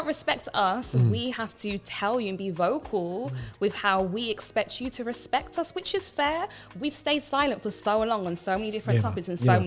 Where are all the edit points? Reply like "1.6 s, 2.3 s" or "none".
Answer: none